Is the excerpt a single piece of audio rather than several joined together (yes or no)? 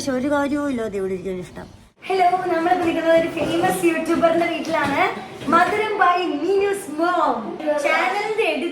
no